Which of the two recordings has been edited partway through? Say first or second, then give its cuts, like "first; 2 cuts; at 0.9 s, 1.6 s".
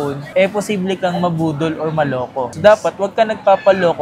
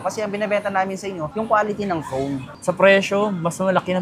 second; 1 cut; at 2.5 s